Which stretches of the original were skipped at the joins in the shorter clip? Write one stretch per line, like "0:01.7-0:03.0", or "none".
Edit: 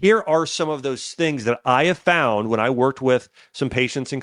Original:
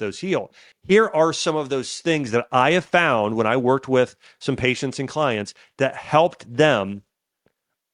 none